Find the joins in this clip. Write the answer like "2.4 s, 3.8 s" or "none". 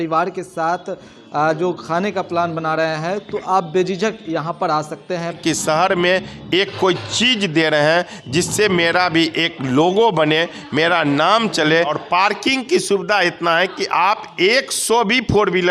5.4 s, 12.0 s